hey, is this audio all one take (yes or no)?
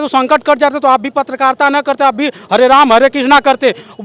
yes